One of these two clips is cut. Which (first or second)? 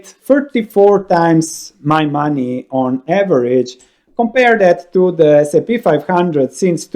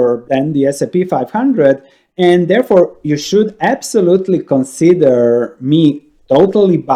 first